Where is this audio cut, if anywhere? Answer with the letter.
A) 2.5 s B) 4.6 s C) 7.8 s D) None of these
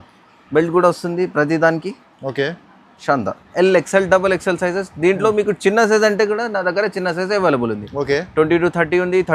D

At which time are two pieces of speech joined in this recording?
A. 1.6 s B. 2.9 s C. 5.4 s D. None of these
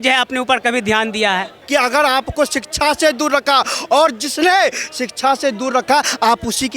A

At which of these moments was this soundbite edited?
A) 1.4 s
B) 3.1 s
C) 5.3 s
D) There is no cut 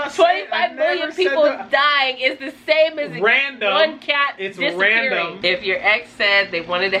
C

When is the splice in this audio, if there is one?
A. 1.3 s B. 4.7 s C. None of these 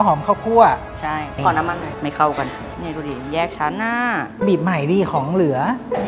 A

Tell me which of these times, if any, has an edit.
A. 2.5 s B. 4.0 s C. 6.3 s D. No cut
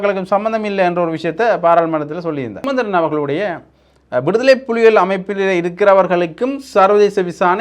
A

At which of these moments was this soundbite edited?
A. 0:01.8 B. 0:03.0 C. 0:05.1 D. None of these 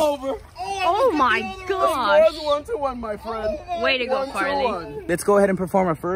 C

